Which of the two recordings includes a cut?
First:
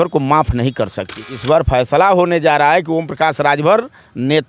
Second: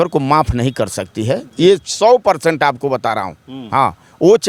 first; 1 cut; at 1.1 s

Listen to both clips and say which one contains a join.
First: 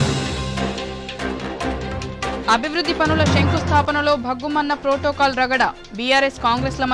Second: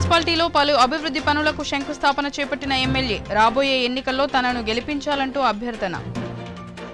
first; 1 cut; at 2.4 s

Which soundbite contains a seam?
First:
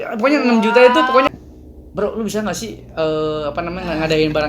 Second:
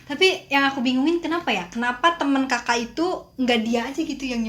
first; 1 cut; at 1.3 s

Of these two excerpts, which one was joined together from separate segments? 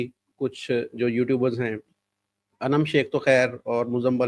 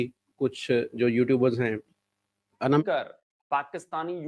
second; 1 cut; at 2.8 s

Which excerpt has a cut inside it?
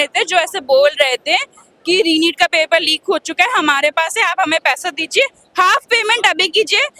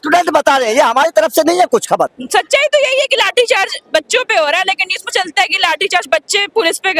second; 1 cut; at 2.2 s

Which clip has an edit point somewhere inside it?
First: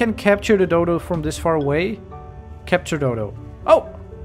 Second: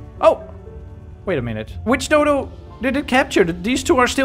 second; 1 cut; at 1.7 s

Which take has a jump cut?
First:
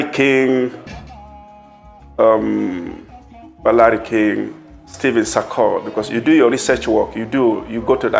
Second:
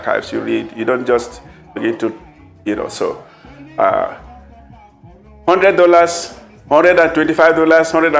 first; 2 cuts; at 0.9 s, 2.1 s

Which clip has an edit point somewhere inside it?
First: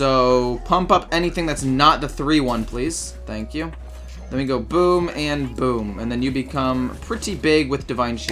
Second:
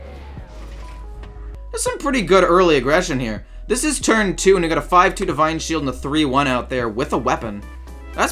second; 1 cut; at 1.6 s

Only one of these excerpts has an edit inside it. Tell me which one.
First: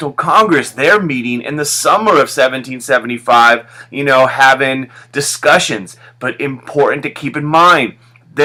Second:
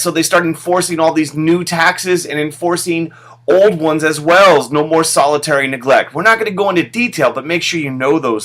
second; 1 cut; at 4.5 s

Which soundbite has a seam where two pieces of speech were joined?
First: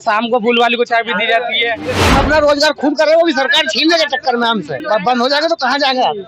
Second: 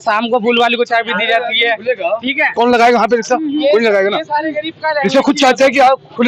first; 2 cuts; at 1.9 s, 4.8 s

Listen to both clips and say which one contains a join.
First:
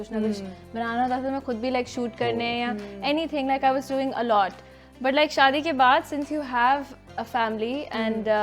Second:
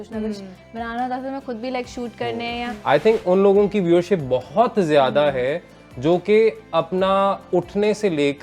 second; 1 cut; at 2.7 s

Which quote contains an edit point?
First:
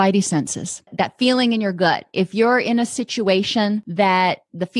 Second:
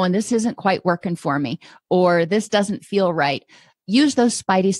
first; 2 cuts; at 0.9 s, 3.9 s

